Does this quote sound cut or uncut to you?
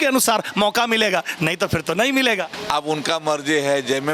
cut